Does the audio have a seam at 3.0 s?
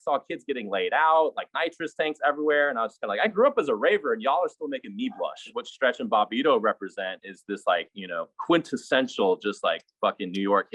no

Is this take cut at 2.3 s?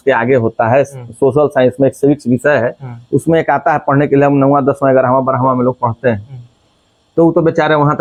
no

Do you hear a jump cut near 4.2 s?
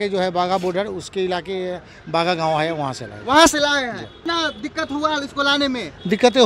yes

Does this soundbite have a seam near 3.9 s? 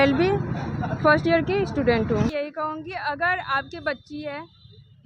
no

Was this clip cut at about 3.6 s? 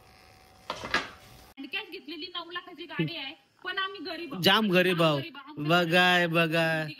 no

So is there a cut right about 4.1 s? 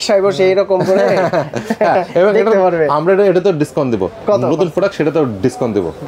no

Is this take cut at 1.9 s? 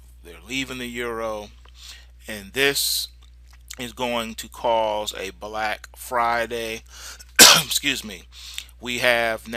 yes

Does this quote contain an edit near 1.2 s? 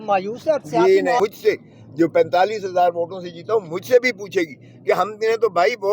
yes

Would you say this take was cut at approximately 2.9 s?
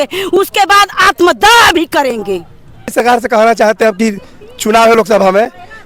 yes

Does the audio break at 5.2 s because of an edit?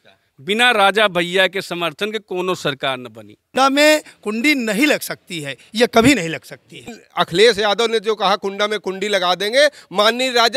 no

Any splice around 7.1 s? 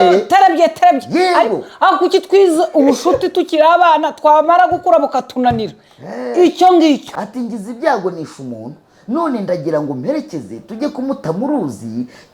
yes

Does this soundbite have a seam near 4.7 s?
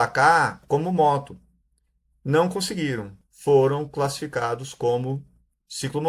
no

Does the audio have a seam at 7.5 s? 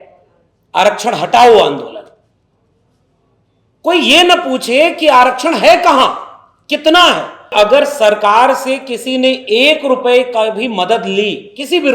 yes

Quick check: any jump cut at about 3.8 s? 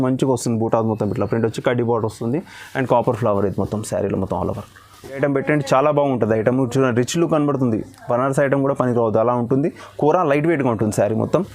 no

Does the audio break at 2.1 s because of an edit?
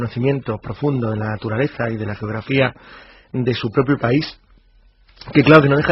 no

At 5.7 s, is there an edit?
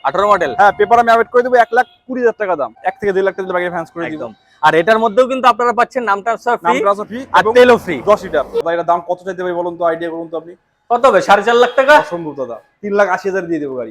no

